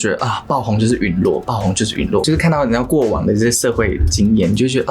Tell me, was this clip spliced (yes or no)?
yes